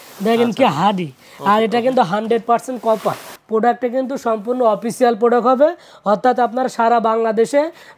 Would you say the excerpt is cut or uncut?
cut